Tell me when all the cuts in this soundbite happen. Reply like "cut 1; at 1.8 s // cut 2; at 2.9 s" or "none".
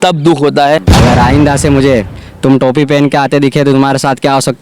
cut 1; at 0.9 s